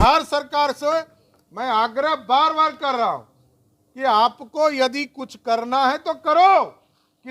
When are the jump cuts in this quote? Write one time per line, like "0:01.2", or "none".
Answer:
none